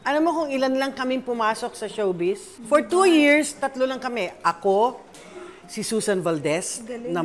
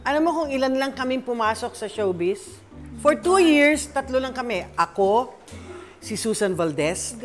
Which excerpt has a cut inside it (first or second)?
first